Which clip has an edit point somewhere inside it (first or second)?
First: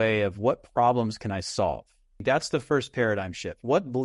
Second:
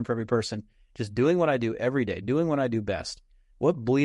first